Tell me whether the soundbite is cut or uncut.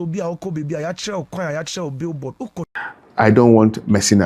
cut